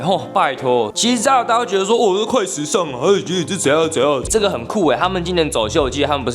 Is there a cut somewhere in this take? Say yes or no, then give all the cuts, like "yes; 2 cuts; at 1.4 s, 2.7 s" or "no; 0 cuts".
yes; 2 cuts; at 0.9 s, 4.3 s